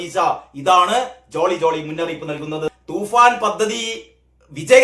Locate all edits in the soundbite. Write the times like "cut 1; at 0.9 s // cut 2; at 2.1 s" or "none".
cut 1; at 2.8 s